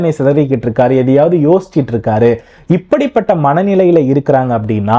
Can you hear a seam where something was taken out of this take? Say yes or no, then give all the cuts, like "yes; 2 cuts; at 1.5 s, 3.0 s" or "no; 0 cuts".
no; 0 cuts